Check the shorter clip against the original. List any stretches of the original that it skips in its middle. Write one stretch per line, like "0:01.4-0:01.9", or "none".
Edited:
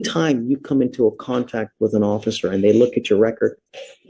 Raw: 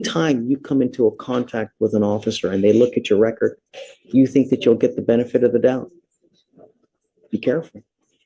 none